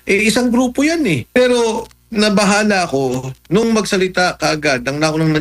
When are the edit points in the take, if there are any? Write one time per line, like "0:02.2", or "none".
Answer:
0:01.3